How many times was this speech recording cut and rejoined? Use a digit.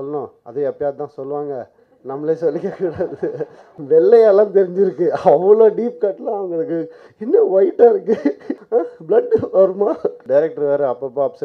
3